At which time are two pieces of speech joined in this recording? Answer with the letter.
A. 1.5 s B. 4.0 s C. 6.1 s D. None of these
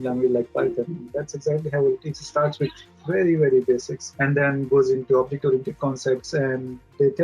B